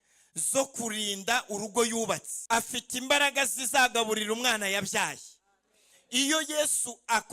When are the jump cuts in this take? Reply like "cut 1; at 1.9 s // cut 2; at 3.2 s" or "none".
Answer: cut 1; at 2.3 s